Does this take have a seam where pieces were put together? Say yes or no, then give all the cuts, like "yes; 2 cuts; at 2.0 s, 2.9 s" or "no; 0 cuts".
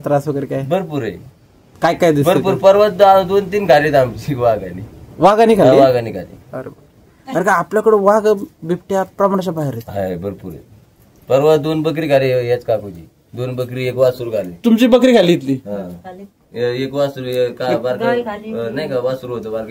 no; 0 cuts